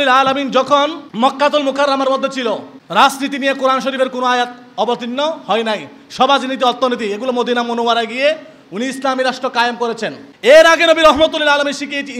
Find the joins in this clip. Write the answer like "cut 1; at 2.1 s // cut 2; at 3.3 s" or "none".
cut 1; at 1.0 s // cut 2; at 2.7 s // cut 3; at 10.2 s

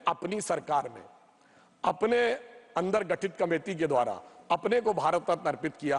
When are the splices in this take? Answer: none

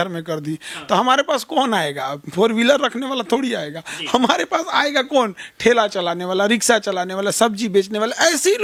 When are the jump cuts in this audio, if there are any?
none

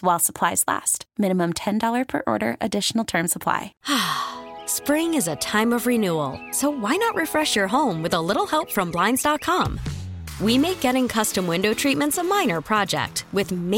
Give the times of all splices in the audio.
cut 1; at 3.7 s

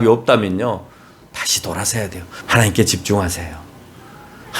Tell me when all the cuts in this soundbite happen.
cut 1; at 2.4 s

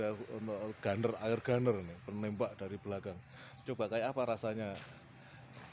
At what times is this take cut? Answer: none

